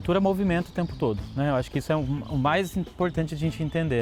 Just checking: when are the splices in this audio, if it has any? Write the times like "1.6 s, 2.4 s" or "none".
none